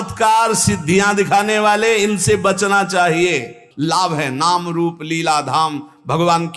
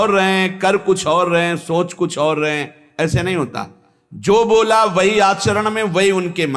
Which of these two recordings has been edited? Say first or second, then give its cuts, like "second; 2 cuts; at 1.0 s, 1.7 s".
first; 1 cut; at 3.6 s